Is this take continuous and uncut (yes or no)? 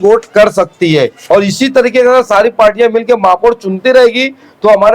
no